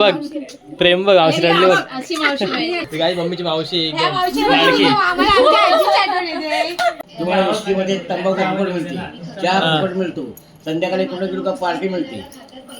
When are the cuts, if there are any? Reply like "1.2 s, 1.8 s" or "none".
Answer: 2.9 s, 7.0 s